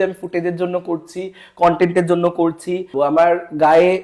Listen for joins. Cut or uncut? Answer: cut